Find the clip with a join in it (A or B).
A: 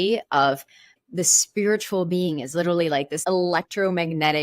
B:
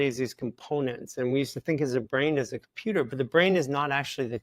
A